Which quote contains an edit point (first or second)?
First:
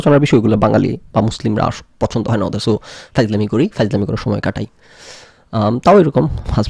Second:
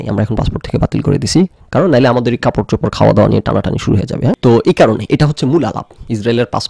second